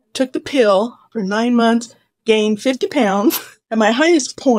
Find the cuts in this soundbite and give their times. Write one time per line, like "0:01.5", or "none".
0:03.5